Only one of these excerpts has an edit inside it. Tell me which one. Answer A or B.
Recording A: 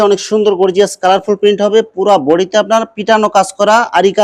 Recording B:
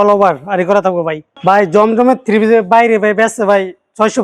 B